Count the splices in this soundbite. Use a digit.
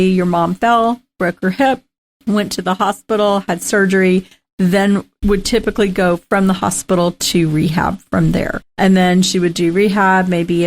1